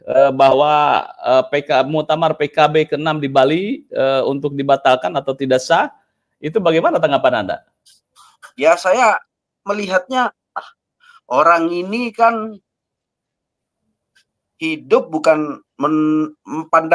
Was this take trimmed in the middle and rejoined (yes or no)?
no